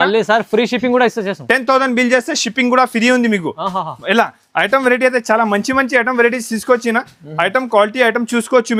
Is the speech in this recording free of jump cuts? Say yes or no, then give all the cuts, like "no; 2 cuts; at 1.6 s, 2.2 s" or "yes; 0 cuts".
yes; 0 cuts